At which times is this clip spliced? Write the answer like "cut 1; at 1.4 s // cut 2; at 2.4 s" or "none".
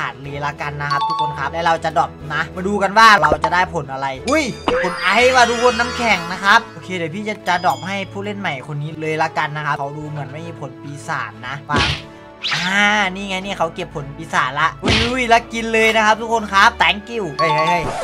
cut 1; at 3.2 s // cut 2; at 12.5 s // cut 3; at 16.8 s